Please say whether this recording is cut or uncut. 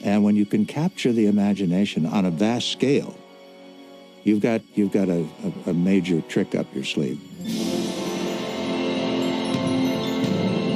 uncut